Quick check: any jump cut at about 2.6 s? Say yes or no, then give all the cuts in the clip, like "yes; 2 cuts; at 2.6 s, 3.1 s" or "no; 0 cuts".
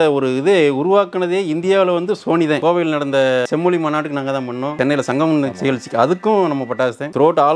yes; 2 cuts; at 2.6 s, 4.7 s